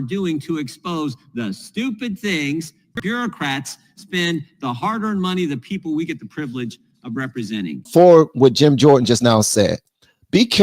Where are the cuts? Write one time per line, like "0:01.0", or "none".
0:02.9
0:07.8